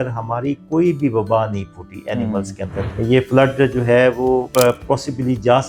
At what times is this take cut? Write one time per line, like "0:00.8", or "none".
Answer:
0:02.8
0:04.5